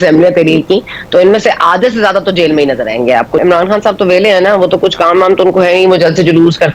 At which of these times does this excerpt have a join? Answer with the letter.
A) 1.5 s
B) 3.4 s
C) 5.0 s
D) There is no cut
B